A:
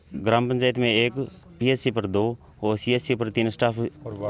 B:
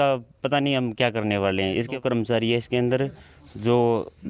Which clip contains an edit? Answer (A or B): B